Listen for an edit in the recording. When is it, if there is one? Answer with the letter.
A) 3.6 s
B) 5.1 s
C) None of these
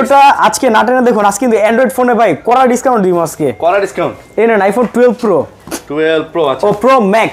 C